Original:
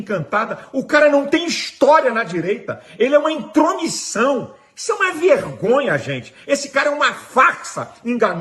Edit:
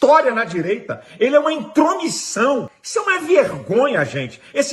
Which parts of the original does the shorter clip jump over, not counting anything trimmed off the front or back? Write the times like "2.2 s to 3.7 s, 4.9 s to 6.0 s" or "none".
4.6 s to 4.7 s